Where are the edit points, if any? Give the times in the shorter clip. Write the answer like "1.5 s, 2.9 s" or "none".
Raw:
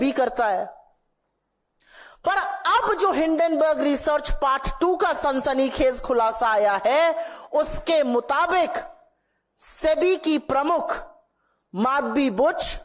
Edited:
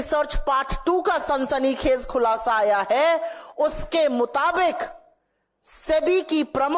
none